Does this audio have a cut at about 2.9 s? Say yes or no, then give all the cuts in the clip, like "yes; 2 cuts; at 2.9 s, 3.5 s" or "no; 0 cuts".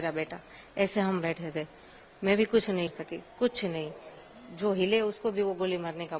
yes; 1 cut; at 2.9 s